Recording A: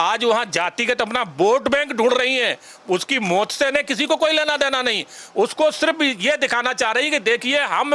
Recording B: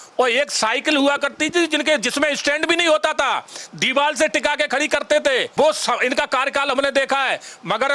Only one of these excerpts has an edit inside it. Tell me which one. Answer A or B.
B